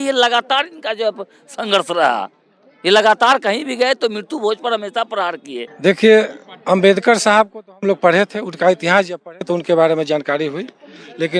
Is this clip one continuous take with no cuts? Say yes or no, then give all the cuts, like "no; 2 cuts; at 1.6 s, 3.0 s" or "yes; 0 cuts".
yes; 0 cuts